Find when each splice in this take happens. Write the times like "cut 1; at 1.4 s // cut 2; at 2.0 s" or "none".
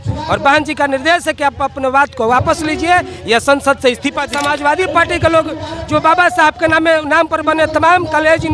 cut 1; at 4.3 s